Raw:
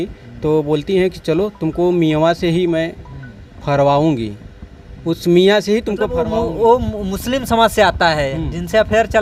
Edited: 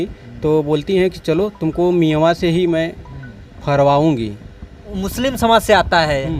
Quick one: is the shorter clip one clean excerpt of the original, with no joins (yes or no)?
no